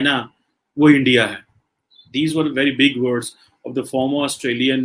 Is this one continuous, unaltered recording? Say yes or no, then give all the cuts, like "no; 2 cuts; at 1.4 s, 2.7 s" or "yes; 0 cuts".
yes; 0 cuts